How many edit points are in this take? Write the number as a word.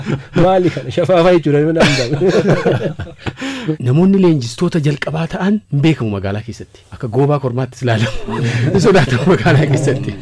one